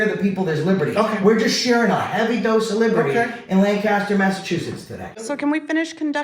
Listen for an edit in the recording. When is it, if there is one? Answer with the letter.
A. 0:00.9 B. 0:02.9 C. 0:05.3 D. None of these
C